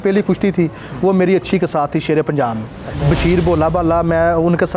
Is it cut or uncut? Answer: cut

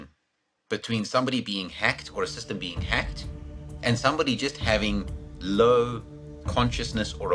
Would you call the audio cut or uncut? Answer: cut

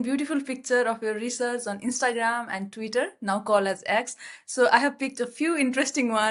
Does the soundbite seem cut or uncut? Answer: uncut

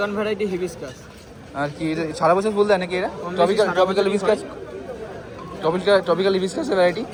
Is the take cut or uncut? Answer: uncut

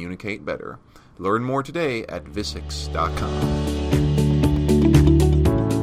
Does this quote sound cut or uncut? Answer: cut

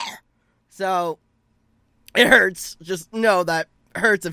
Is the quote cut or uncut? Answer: uncut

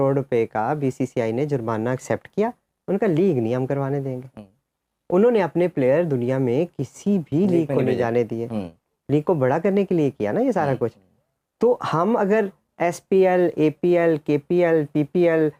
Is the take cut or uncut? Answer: uncut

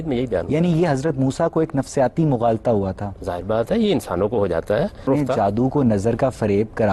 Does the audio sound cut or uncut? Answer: cut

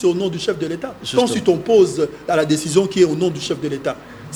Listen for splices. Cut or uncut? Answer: uncut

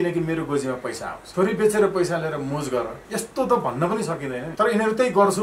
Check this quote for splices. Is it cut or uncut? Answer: cut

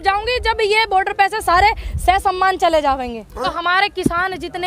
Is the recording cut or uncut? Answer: cut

